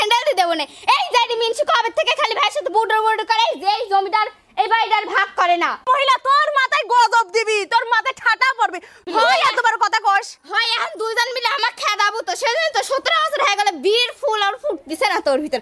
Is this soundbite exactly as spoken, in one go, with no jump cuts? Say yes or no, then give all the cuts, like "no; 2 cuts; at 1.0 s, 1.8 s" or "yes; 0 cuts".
no; 2 cuts; at 5.8 s, 9.0 s